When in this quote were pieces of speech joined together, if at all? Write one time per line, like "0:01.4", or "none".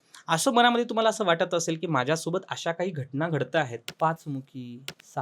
0:03.8